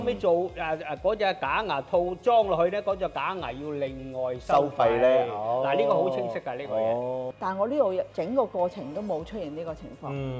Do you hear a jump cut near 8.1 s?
yes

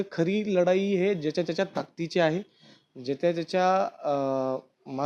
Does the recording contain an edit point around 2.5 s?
no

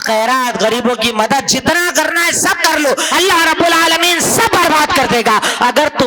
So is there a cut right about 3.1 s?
yes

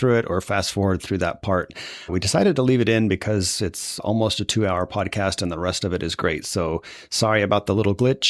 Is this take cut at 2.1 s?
yes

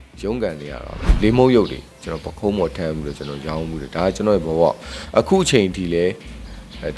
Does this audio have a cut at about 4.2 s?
no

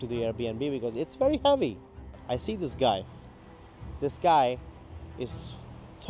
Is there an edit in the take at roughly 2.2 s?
yes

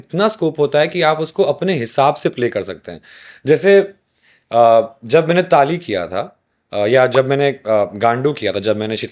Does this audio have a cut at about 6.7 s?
no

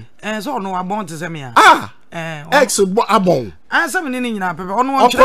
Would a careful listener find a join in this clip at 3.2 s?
no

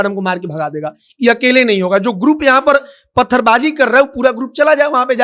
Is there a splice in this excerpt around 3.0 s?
no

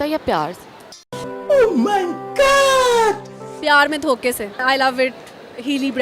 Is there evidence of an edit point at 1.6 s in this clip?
no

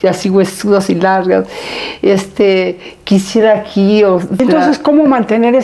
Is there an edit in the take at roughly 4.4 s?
yes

